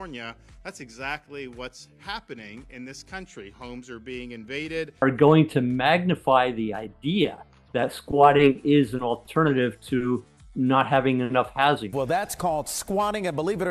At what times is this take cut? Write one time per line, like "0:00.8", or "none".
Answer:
0:04.9
0:11.9